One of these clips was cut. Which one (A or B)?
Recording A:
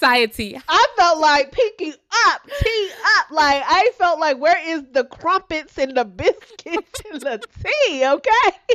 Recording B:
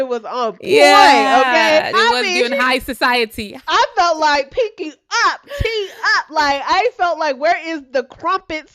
B